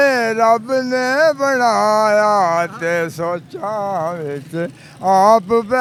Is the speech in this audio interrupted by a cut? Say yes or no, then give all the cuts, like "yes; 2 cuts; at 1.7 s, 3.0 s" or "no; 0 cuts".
no; 0 cuts